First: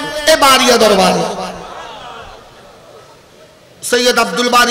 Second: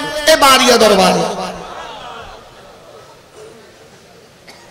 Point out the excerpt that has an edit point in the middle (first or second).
first